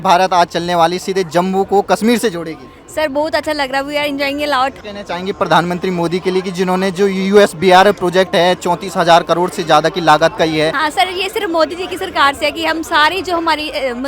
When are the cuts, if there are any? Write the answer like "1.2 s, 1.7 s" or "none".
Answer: 4.8 s, 10.8 s